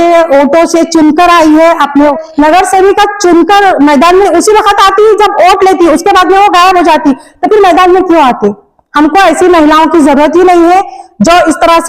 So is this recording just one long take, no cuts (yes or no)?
no